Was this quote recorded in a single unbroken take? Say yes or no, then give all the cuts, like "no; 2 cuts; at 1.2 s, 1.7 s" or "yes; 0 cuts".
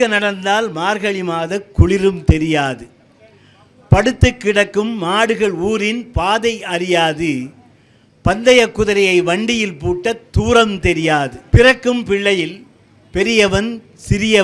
no; 1 cut; at 11.4 s